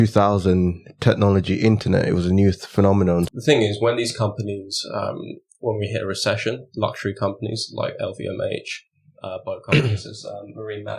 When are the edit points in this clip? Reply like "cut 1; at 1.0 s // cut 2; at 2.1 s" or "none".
cut 1; at 3.3 s